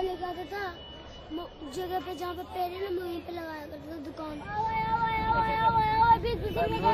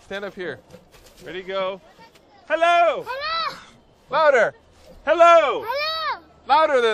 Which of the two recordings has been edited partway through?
second; 1 cut; at 3.0 s

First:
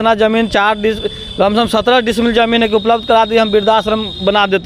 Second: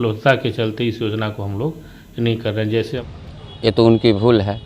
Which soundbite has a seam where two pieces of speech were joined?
second; 1 cut; at 3.0 s

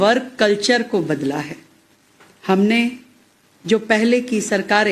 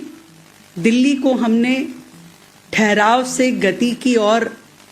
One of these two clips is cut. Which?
first; 1 cut; at 4.0 s

